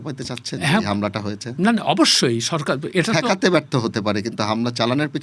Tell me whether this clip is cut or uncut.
uncut